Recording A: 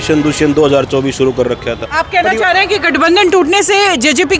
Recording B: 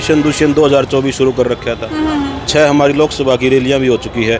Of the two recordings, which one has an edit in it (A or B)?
A